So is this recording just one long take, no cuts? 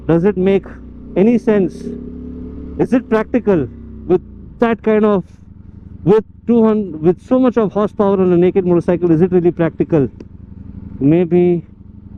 yes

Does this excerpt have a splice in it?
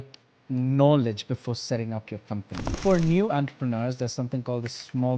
yes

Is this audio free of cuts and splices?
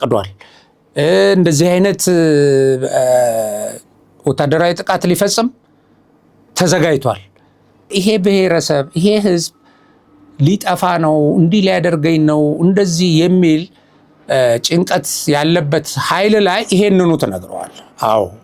no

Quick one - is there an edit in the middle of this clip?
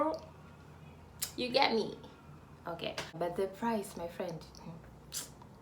yes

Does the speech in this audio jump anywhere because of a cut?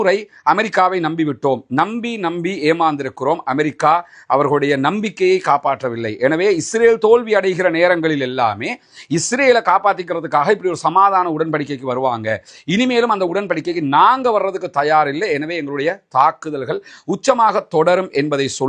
no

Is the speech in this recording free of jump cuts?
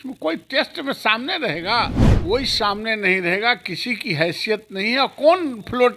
no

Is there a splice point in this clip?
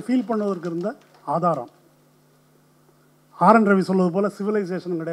no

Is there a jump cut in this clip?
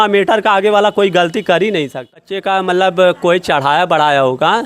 yes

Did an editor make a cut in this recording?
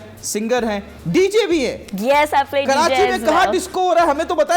no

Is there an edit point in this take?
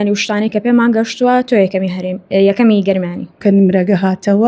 yes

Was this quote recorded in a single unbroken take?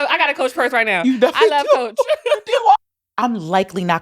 no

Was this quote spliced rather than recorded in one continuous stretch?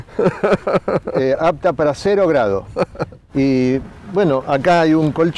yes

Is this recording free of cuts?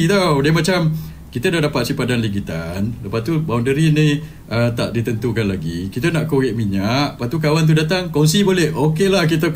yes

